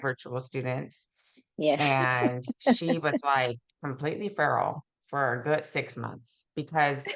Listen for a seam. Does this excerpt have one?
yes; 1 cut; at 3.7 s

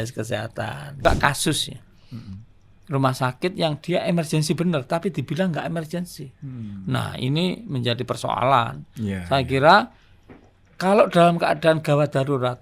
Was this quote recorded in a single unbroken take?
no; 1 cut; at 1.0 s

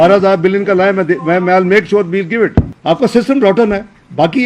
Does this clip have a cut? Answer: yes; 1 cut; at 2.7 s

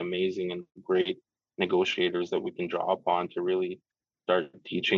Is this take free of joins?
yes; 0 cuts

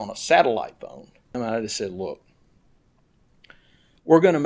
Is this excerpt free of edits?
no; 1 cut; at 1.3 s

